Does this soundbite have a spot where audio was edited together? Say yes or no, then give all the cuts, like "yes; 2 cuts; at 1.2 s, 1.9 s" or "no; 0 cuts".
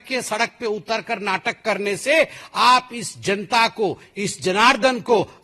no; 0 cuts